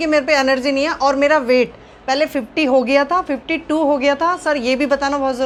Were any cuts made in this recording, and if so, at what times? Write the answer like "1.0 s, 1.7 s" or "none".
none